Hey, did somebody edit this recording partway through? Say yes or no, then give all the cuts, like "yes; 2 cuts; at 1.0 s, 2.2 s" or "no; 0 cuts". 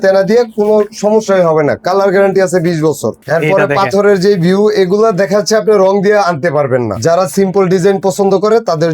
yes; 2 cuts; at 3.2 s, 6.9 s